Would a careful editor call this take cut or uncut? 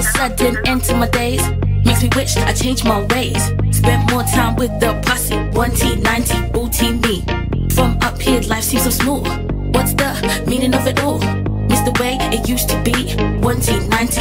uncut